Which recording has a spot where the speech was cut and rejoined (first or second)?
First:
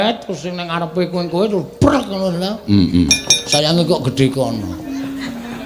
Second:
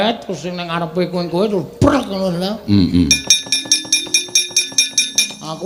first